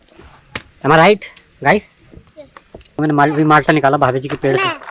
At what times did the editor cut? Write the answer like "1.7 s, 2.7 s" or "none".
2.8 s